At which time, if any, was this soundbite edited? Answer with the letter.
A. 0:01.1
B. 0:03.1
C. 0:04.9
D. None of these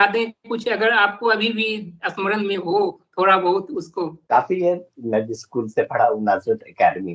C